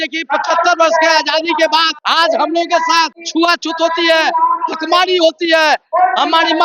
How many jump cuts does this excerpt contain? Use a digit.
2